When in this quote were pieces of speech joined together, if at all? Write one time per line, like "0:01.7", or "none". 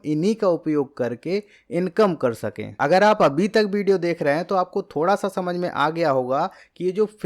none

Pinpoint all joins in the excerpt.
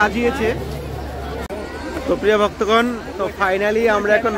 0:01.5

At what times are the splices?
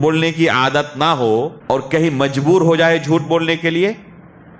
0:01.6

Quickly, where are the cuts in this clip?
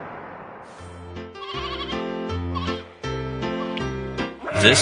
0:01.0

